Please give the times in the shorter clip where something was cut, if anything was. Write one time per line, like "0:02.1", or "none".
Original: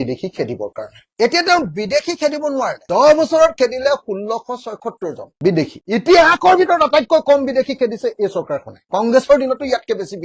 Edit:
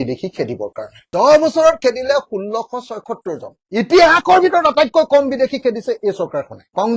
0:01.0
0:03.6